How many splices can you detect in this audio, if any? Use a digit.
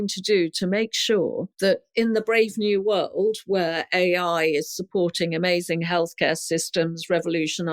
1